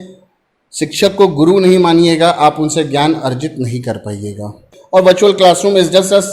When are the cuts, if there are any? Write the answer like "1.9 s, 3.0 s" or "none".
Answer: 4.7 s